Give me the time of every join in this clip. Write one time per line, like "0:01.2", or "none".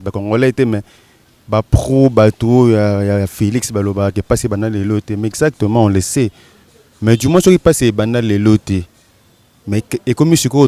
none